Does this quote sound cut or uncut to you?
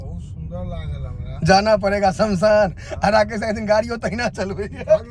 uncut